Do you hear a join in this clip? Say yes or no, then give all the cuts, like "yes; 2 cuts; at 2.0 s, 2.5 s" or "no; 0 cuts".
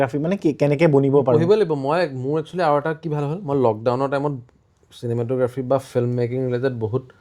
no; 0 cuts